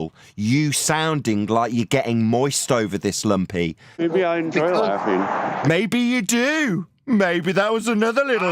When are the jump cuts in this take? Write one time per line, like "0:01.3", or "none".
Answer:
0:04.0